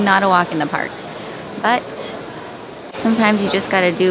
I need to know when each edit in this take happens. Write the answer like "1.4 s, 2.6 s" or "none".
none